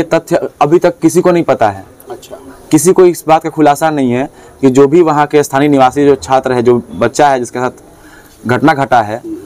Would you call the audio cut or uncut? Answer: uncut